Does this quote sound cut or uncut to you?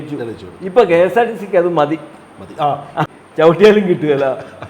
cut